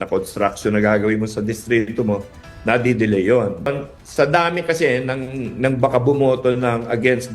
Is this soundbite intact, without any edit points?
no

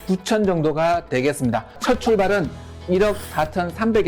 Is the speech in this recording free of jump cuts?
no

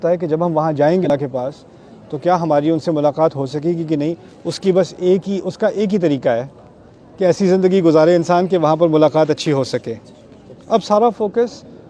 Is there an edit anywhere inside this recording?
yes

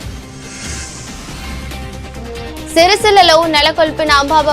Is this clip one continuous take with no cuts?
no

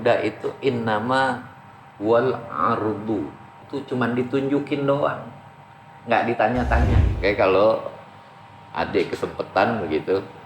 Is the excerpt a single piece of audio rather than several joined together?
no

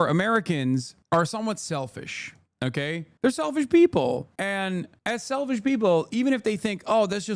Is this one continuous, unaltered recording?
yes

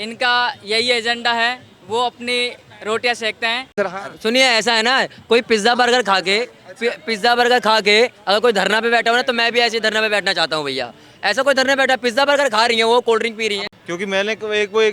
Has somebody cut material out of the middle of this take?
yes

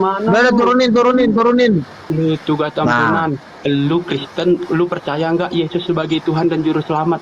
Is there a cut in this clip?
yes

